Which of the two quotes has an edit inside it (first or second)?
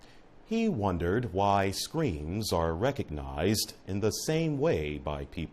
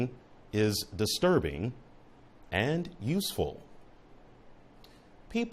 first